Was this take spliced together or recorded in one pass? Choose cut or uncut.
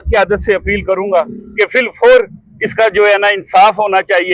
uncut